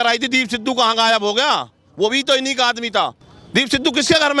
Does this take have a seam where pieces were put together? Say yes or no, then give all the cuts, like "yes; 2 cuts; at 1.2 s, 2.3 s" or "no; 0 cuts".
yes; 1 cut; at 3.3 s